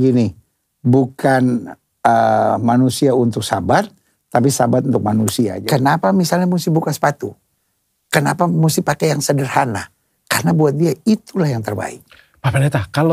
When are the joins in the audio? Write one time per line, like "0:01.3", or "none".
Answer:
0:05.6